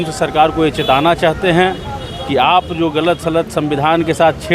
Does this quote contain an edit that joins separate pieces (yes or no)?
no